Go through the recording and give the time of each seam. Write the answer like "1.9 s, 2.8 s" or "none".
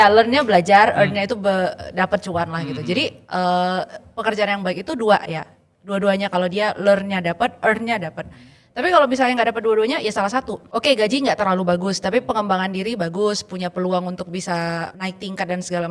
10.6 s, 14.9 s